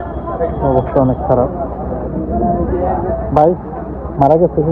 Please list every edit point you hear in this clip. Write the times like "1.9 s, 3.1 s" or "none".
none

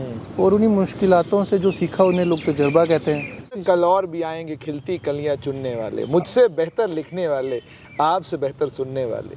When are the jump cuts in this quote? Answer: 3.6 s

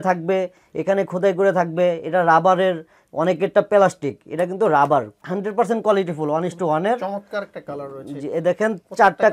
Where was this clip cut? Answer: 5.2 s

